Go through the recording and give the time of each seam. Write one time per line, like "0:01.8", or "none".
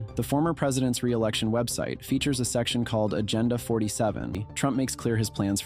0:04.4